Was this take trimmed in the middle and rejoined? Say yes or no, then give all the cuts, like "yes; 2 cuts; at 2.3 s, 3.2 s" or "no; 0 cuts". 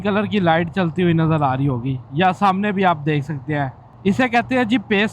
yes; 1 cut; at 3.8 s